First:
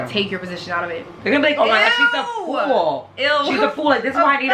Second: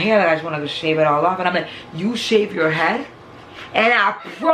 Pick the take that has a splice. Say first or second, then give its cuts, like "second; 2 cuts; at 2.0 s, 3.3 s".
first; 1 cut; at 1.0 s